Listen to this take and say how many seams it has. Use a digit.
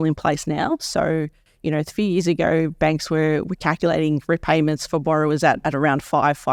0